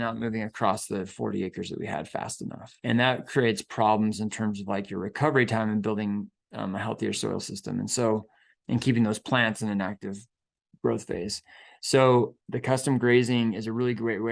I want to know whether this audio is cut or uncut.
cut